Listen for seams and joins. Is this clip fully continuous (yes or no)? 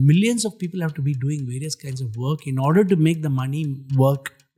yes